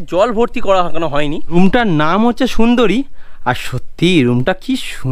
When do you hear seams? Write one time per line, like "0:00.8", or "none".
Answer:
0:01.4

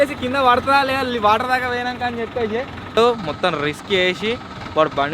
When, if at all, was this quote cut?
0:03.0

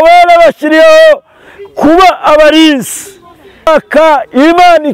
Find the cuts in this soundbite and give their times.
0:03.7

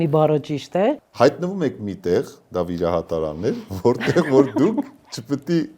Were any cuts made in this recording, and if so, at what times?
0:01.1

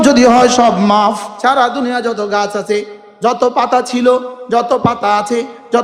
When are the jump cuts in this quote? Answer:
0:01.3

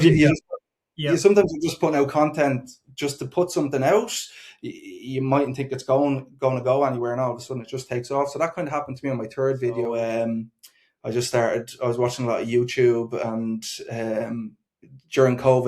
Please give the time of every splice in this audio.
0:09.9

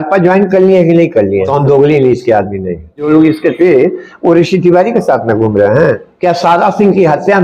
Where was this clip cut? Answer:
0:01.5
0:03.1
0:06.1

